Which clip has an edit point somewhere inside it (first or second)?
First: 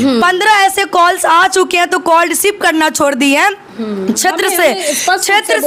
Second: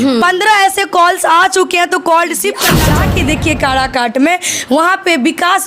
second